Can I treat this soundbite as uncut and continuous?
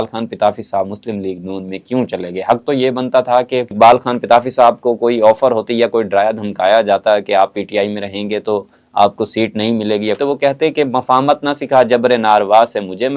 no; 2 cuts; at 3.7 s, 10.2 s

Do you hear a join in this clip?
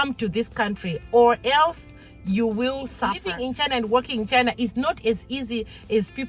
yes; 1 cut; at 3.3 s

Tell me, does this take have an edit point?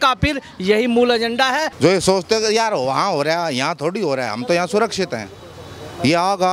yes; 1 cut; at 1.7 s

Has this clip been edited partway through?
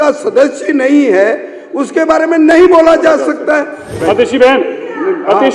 yes; 1 cut; at 3.9 s

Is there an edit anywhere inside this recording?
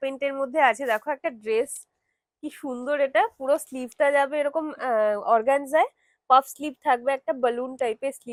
no; 0 cuts

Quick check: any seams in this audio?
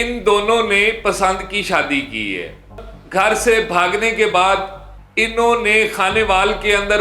yes; 1 cut; at 2.9 s

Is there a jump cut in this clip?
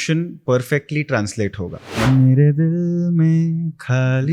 yes; 1 cut; at 2.1 s

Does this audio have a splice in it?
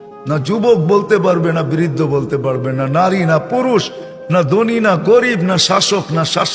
no; 0 cuts

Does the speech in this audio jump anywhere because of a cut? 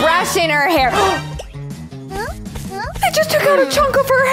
no; 0 cuts

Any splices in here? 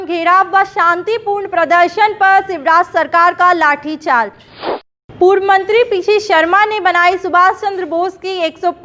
yes; 1 cut; at 4.7 s

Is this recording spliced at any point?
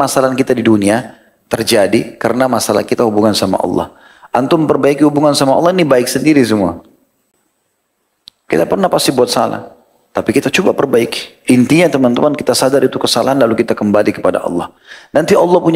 no; 0 cuts

